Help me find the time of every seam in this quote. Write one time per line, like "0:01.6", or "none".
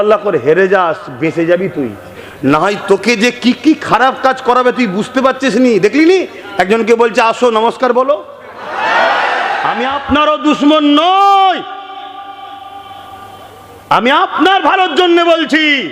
0:09.7